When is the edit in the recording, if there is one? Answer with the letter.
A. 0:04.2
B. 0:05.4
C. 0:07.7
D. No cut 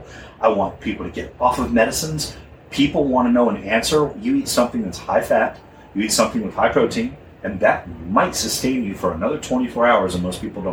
A